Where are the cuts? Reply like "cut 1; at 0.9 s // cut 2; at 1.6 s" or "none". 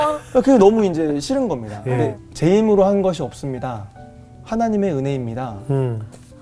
cut 1; at 2.1 s